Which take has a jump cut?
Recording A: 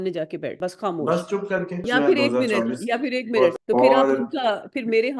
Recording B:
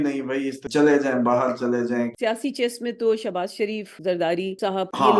A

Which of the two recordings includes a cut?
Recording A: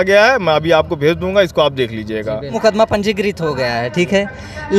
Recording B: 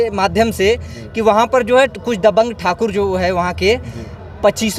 A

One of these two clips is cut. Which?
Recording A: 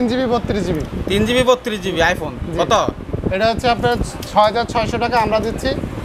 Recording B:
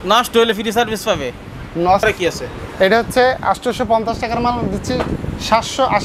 B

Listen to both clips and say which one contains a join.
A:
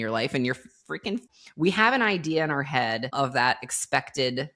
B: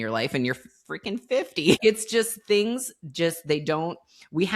A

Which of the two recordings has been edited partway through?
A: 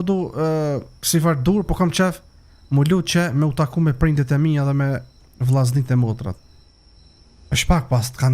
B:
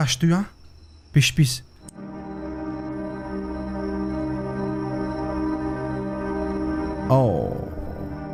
A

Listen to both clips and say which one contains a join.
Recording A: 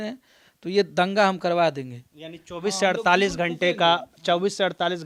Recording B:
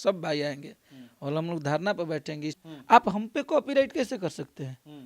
B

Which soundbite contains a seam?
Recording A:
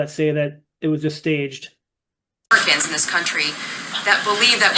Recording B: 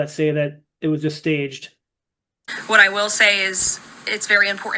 B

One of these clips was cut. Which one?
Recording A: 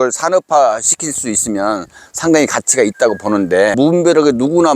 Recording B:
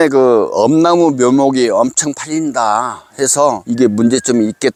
A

